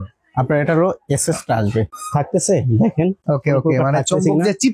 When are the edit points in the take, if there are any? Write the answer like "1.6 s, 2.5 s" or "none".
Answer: 1.9 s, 3.2 s